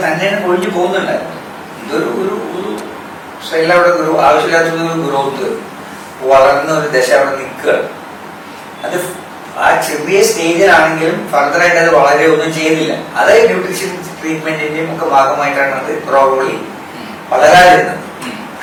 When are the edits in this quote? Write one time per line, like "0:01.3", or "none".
none